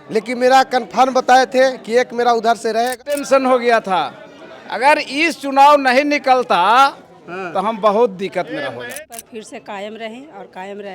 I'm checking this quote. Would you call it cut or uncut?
cut